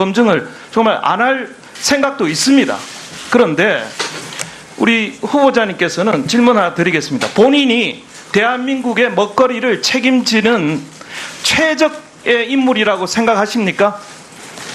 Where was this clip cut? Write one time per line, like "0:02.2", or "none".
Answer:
0:01.2